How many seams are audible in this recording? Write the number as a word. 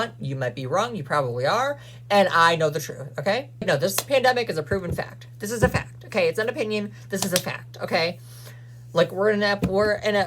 one